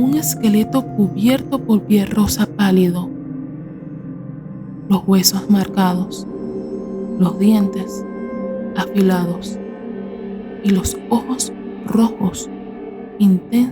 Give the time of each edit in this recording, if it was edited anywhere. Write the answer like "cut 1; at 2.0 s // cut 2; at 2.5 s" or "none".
cut 1; at 9.4 s // cut 2; at 10.6 s